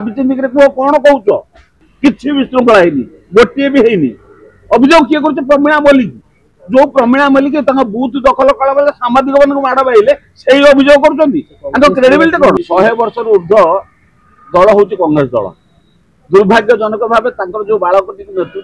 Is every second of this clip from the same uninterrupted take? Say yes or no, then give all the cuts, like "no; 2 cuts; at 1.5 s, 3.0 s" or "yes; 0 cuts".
no; 2 cuts; at 1.8 s, 12.6 s